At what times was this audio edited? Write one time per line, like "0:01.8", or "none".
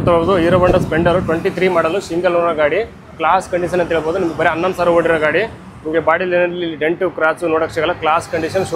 none